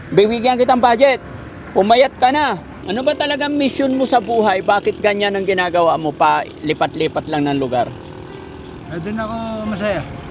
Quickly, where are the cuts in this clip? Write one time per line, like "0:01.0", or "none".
0:02.7